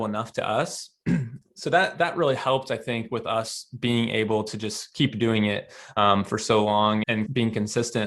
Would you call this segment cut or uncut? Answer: cut